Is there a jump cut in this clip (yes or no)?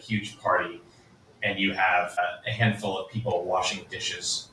yes